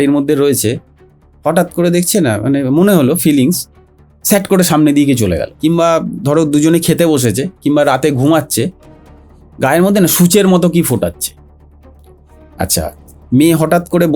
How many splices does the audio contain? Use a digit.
1